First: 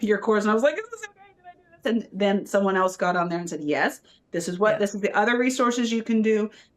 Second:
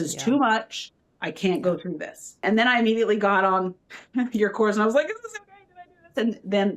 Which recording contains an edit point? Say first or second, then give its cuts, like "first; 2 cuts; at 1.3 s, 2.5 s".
second; 1 cut; at 2.4 s